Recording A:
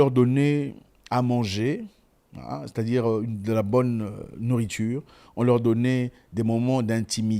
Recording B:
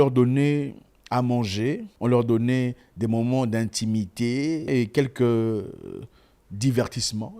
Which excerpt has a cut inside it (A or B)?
B